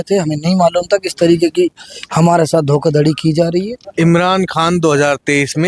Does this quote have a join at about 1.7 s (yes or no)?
no